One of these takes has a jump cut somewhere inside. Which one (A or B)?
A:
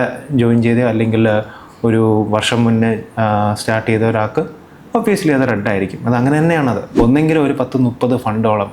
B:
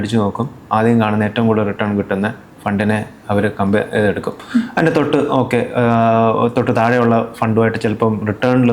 A